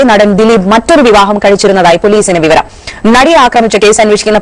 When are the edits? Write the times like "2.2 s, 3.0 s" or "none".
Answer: none